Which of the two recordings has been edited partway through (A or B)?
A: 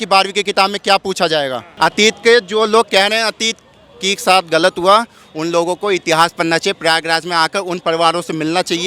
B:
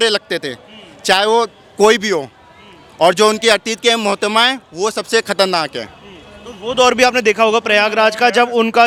A